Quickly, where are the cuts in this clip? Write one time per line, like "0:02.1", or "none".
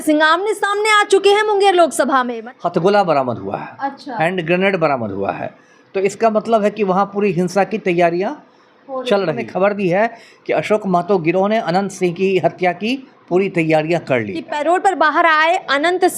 0:02.4
0:09.5
0:14.4